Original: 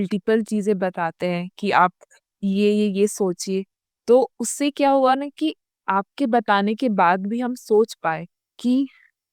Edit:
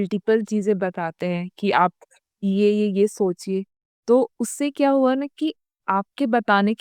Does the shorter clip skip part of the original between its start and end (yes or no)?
no